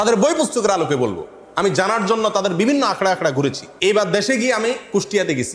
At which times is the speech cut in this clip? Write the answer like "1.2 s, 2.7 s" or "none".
3.7 s